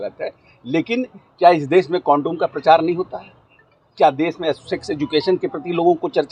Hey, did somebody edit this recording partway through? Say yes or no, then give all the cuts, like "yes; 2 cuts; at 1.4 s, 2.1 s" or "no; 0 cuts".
no; 0 cuts